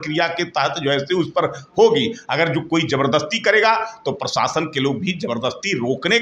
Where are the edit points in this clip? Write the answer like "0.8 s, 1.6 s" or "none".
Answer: none